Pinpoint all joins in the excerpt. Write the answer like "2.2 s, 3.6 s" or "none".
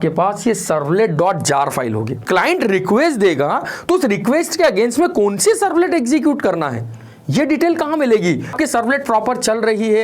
2.2 s, 8.5 s